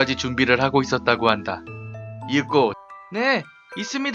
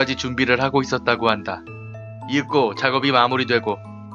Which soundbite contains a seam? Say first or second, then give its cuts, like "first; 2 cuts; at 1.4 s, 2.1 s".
second; 1 cut; at 2.8 s